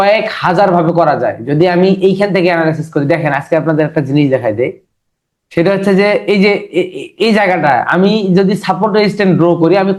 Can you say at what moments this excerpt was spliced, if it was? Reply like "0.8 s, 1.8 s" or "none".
none